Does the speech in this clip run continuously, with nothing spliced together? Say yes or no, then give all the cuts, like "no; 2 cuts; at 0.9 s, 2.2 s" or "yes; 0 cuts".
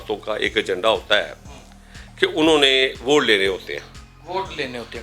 yes; 0 cuts